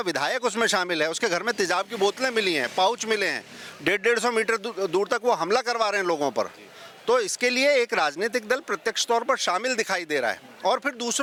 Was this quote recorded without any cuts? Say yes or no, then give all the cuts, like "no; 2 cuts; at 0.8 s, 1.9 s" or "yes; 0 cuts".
yes; 0 cuts